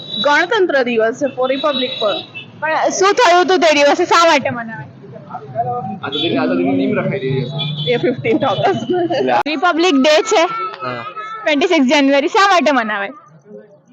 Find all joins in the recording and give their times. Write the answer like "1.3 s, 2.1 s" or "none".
9.4 s